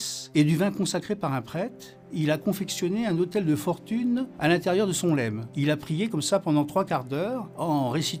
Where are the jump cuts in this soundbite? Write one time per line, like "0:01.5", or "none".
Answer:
none